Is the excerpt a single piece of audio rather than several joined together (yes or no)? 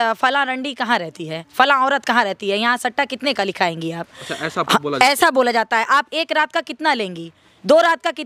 yes